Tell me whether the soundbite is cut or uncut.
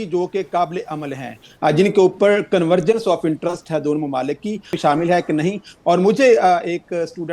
cut